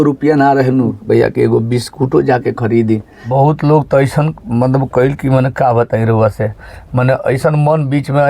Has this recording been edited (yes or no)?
yes